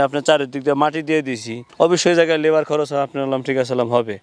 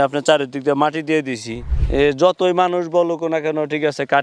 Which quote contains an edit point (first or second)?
second